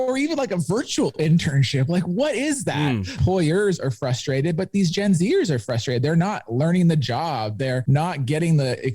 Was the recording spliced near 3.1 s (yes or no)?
yes